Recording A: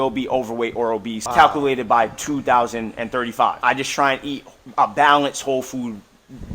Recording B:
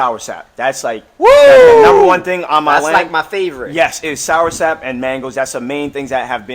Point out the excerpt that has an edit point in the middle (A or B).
A